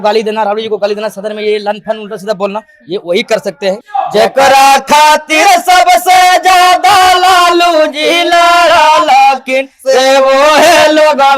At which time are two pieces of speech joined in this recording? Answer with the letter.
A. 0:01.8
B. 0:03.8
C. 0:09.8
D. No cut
B